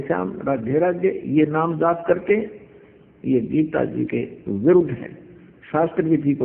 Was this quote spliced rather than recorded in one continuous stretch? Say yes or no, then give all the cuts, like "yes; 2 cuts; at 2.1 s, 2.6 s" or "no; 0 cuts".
no; 0 cuts